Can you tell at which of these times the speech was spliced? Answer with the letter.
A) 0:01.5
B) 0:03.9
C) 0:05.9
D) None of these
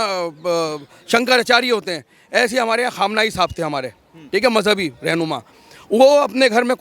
D